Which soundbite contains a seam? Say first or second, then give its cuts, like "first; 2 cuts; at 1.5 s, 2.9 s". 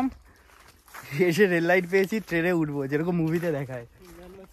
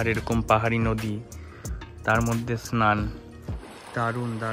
second; 1 cut; at 3.6 s